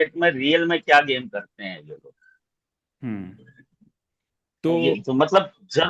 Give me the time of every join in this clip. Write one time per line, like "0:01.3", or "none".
none